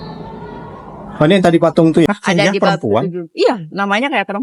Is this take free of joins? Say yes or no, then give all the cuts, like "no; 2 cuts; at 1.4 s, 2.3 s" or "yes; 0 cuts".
no; 1 cut; at 2.1 s